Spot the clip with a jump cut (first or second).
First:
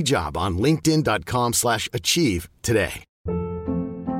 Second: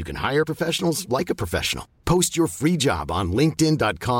first